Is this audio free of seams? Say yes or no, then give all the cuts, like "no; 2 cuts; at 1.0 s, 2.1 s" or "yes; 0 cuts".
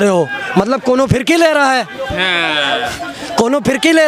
yes; 0 cuts